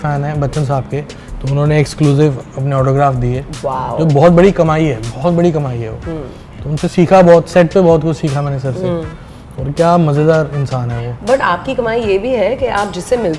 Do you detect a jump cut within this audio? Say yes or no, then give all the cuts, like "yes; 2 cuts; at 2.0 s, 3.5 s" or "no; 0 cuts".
no; 0 cuts